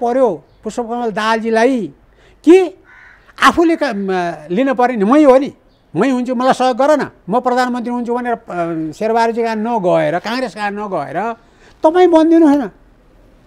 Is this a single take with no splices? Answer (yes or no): yes